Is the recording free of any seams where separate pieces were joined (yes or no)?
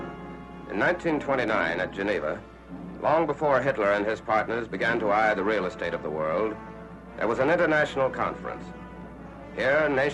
no